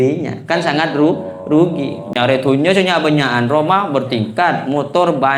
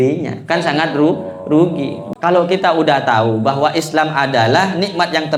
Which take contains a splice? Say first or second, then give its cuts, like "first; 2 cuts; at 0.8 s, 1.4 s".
second; 1 cut; at 2.0 s